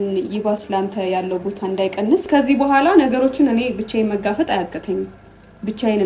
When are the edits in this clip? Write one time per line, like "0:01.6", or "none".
0:02.3